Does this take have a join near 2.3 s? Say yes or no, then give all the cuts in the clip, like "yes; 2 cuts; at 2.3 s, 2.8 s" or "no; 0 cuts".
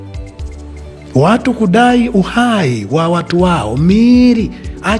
no; 1 cut; at 1.1 s